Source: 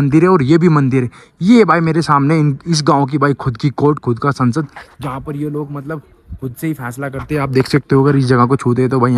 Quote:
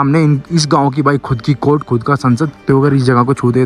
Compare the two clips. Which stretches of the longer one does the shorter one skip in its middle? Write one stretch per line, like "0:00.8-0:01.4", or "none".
0:04.8-0:07.8